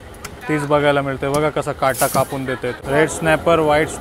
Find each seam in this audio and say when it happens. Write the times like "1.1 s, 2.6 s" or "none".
2.8 s